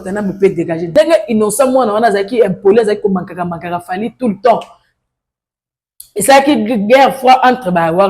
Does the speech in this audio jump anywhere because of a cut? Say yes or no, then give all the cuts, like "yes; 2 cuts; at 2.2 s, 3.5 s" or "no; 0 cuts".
yes; 1 cut; at 0.9 s